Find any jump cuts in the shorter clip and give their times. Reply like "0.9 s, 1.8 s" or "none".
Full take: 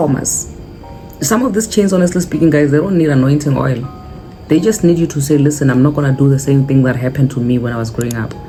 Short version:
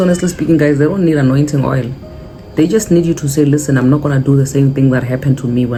none